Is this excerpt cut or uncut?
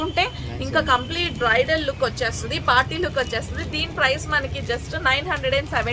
uncut